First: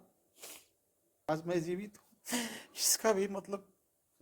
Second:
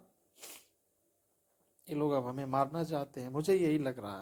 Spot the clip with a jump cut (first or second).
first